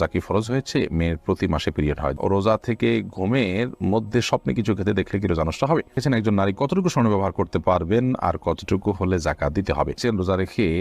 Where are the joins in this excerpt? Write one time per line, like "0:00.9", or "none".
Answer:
0:02.2
0:06.0
0:10.0